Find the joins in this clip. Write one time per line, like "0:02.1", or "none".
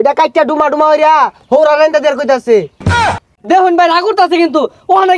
0:03.0